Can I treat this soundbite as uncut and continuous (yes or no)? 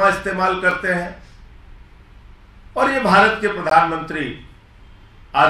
yes